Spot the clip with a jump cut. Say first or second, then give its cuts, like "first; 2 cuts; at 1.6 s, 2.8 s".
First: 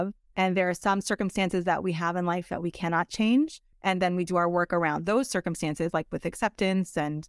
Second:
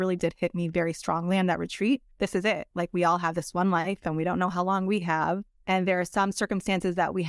first; 1 cut; at 3.7 s